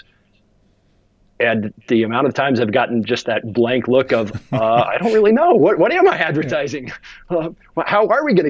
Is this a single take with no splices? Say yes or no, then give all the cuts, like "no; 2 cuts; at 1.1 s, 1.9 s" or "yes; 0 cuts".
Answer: yes; 0 cuts